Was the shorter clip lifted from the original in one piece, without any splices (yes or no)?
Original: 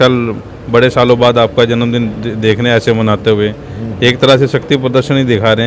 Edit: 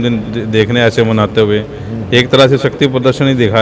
yes